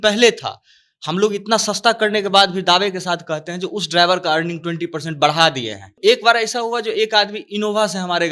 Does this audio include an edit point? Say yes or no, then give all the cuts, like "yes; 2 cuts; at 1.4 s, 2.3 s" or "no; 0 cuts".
yes; 1 cut; at 6.0 s